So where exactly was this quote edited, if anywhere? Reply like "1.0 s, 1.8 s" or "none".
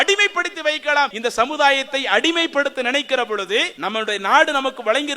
1.2 s, 3.7 s